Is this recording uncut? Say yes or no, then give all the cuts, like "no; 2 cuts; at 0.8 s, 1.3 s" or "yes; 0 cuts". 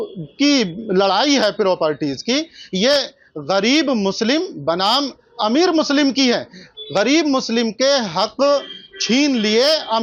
yes; 0 cuts